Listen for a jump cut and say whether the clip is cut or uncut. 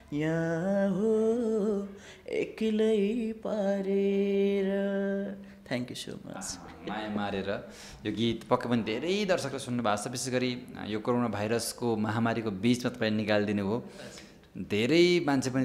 uncut